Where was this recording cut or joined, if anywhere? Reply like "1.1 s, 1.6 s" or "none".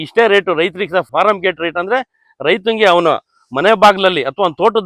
1.1 s